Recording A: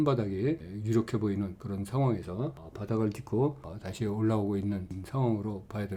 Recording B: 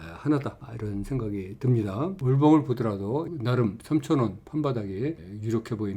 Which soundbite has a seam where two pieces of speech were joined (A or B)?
B